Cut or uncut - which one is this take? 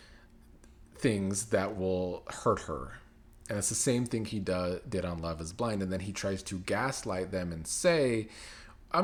uncut